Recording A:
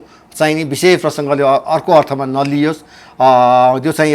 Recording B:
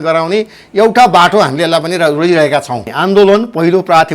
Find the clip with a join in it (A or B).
B